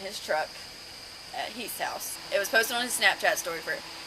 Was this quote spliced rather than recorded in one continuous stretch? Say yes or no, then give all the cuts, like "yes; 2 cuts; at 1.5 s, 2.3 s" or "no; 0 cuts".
yes; 1 cut; at 2.1 s